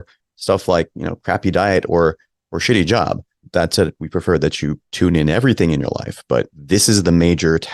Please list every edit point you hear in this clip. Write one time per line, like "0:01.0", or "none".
0:03.4
0:04.8
0:06.6